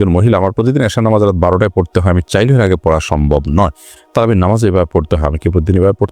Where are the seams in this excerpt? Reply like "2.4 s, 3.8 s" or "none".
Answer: none